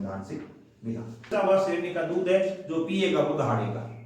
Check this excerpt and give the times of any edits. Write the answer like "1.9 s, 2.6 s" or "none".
1.3 s